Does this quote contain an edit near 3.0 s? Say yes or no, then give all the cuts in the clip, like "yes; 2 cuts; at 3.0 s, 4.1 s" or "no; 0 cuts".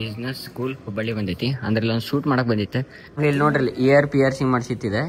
yes; 1 cut; at 3.0 s